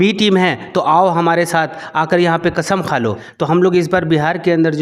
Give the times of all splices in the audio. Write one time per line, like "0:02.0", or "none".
0:03.3